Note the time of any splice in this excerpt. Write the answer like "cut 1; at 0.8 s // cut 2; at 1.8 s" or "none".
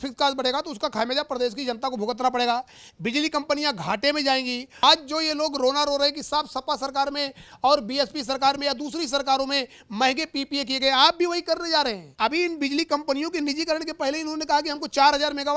cut 1; at 4.8 s // cut 2; at 12.0 s